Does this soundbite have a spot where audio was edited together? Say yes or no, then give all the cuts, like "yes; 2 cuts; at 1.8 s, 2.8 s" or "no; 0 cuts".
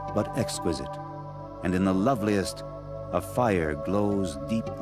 yes; 1 cut; at 3.4 s